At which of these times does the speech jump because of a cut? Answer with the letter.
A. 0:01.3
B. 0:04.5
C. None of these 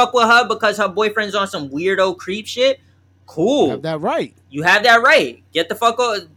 C